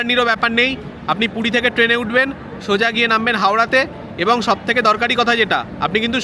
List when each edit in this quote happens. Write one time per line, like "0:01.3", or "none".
none